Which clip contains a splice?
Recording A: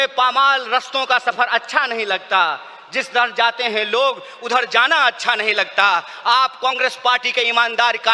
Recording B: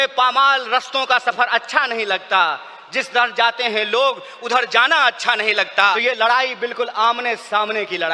B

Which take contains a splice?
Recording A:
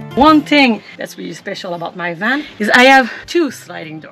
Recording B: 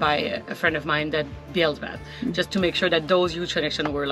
A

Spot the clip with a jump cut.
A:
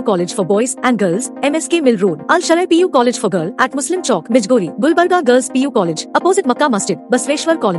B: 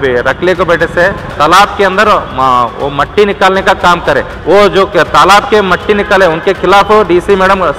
B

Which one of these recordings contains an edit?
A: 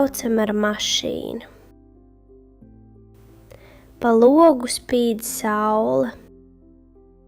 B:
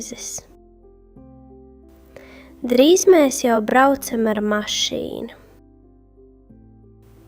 A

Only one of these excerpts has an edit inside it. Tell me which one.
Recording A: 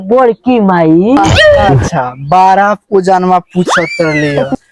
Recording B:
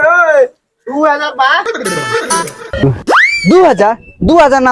B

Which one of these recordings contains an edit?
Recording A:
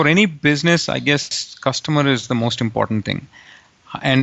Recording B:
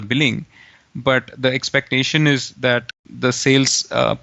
B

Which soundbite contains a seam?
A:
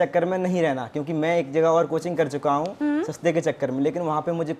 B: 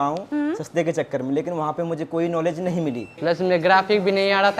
B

